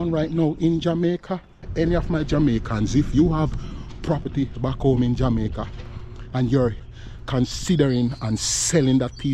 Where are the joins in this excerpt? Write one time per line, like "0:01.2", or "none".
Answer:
0:01.7
0:06.8